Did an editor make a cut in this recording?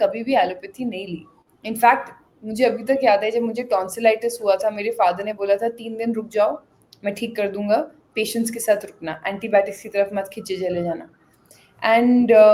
no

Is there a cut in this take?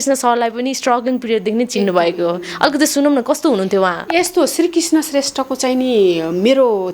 no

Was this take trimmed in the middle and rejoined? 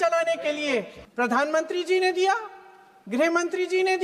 yes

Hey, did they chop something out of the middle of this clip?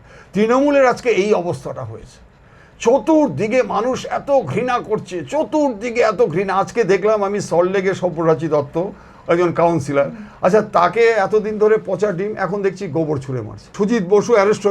yes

